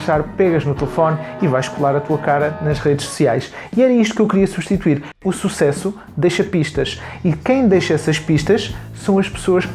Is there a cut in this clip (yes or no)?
yes